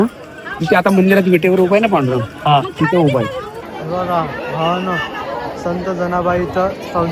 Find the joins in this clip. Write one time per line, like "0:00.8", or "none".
0:03.6

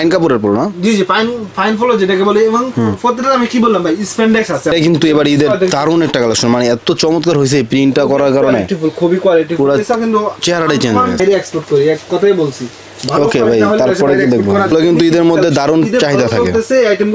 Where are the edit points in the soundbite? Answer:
0:04.7
0:11.2
0:14.7

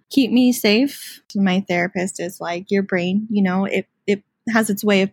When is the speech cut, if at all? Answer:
0:01.3

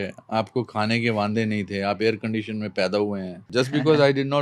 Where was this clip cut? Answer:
0:03.4

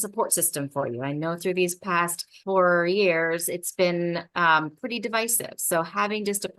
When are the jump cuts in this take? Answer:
0:02.3

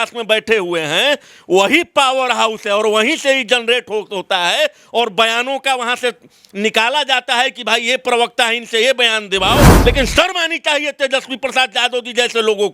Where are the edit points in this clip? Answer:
0:09.7

